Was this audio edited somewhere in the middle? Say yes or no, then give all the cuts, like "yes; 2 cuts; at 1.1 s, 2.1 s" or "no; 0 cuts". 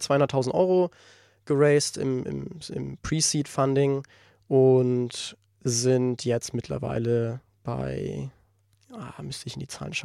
no; 0 cuts